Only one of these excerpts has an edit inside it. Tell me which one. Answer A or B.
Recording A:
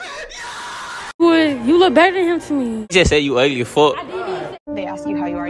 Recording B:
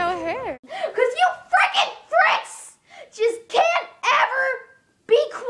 A